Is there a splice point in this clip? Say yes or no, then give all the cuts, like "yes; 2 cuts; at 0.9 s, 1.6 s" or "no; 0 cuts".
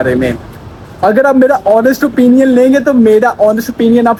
no; 0 cuts